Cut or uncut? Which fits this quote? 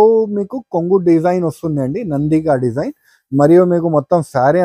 uncut